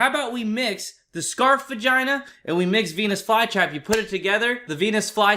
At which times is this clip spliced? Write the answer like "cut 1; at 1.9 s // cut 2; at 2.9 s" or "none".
none